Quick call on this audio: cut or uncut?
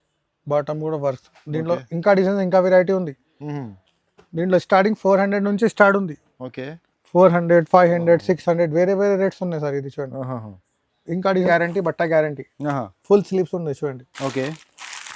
cut